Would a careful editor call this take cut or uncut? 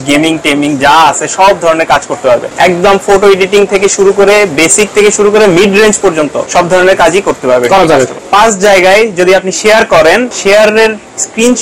cut